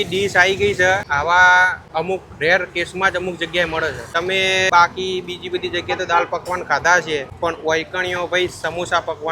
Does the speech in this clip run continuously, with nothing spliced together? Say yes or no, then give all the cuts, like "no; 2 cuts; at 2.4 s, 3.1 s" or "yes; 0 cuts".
no; 4 cuts; at 1.1 s, 1.8 s, 4.2 s, 7.3 s